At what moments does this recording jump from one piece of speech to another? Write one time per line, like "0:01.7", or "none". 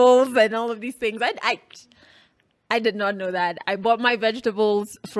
none